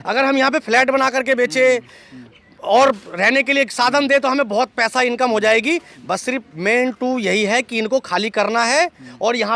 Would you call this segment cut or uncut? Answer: uncut